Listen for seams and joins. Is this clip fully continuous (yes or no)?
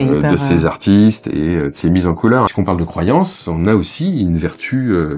no